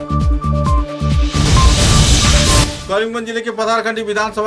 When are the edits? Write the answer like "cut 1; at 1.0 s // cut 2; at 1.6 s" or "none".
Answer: cut 1; at 2.8 s